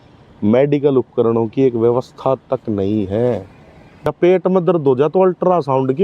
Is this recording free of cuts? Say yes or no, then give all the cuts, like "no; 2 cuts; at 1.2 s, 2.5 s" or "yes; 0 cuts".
no; 1 cut; at 4.1 s